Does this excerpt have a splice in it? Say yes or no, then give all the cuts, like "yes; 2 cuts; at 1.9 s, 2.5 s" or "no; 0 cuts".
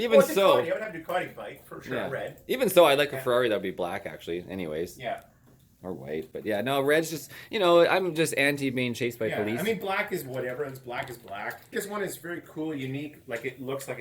yes; 1 cut; at 11.7 s